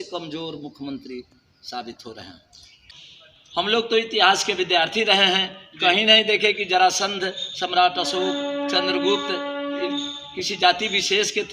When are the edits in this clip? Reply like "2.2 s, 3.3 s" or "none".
2.7 s